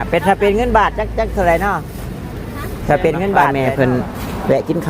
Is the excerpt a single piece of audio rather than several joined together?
no; 1 cut; at 3.5 s

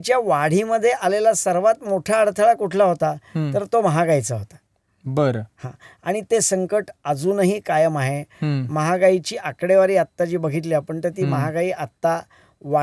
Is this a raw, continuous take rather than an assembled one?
yes; 0 cuts

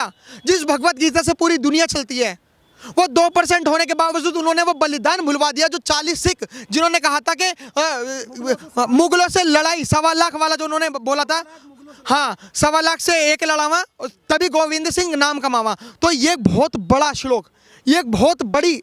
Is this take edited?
no; 0 cuts

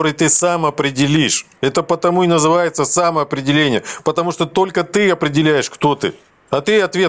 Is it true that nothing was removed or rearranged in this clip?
yes; 0 cuts

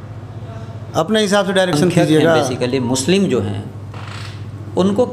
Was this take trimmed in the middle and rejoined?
yes; 1 cut; at 2.5 s

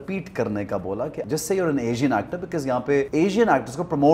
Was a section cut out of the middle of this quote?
yes; 2 cuts; at 1.2 s, 3.1 s

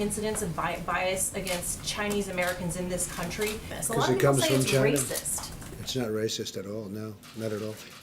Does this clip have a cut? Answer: yes; 1 cut; at 3.8 s

